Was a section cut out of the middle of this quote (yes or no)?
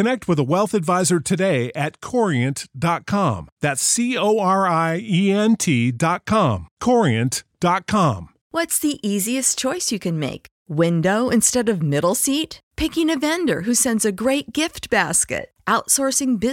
yes